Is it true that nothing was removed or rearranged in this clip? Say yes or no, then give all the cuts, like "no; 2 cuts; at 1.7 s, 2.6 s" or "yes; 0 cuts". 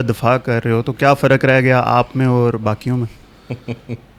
yes; 0 cuts